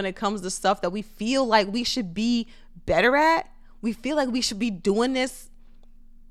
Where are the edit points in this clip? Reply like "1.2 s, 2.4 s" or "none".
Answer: none